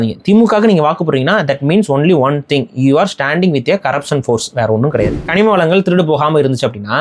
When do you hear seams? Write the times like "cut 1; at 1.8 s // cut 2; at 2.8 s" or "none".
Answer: cut 1; at 5.2 s